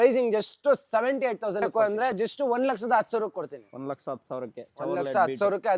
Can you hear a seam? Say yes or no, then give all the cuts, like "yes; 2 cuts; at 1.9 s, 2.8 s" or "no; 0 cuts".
yes; 1 cut; at 1.7 s